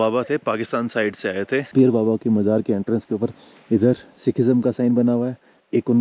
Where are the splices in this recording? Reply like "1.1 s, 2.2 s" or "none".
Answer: none